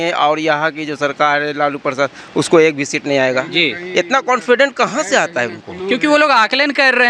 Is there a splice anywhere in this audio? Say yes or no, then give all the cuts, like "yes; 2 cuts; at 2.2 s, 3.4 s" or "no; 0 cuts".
no; 0 cuts